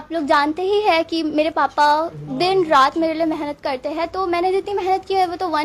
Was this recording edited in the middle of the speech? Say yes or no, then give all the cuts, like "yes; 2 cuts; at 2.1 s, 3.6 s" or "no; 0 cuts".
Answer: no; 0 cuts